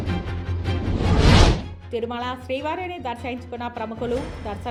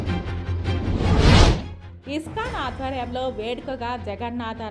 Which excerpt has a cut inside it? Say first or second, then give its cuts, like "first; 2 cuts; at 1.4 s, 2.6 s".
second; 1 cut; at 1.7 s